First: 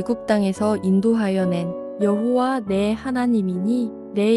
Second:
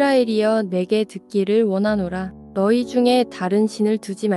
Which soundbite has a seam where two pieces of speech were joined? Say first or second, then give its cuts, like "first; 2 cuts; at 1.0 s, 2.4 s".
second; 1 cut; at 2.4 s